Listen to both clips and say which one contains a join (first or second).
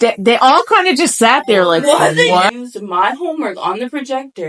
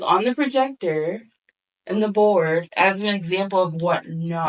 first